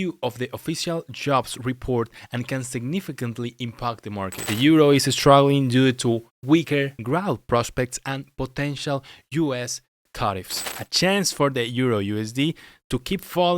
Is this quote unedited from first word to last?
no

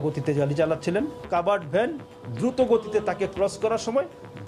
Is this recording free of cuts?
yes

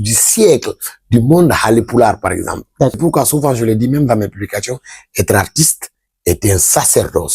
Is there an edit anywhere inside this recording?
yes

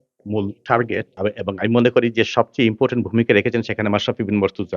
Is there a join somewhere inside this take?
yes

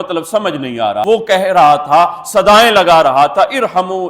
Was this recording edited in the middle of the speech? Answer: yes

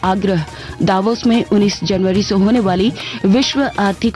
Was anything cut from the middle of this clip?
no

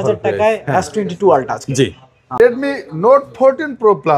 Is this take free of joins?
no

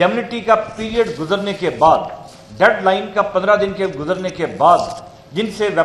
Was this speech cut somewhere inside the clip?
no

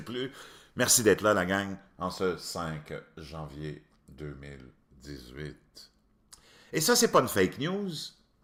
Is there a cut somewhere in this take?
no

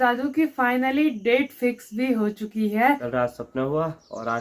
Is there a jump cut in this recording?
yes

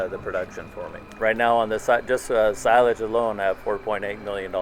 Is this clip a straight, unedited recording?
no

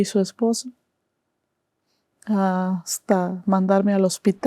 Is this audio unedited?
yes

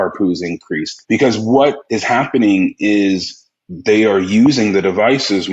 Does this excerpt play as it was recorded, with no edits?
no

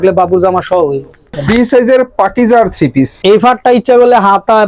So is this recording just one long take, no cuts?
no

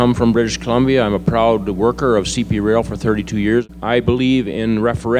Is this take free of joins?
no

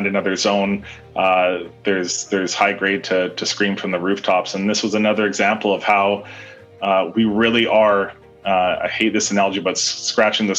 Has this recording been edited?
no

